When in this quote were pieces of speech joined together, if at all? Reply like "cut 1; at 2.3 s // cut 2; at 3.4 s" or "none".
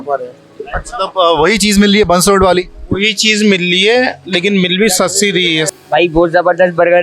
cut 1; at 5.7 s